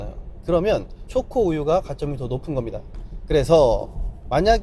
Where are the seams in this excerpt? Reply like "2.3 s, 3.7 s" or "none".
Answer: none